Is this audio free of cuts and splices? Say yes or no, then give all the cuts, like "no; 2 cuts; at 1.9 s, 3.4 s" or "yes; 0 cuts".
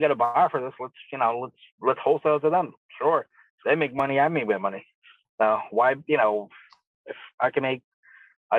no; 1 cut; at 5.3 s